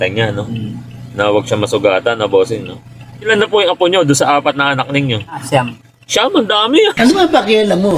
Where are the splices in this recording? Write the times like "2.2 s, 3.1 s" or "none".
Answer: none